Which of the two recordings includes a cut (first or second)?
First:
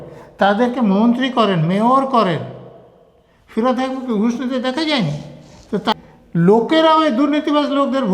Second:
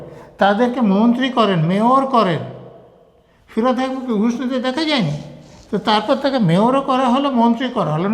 first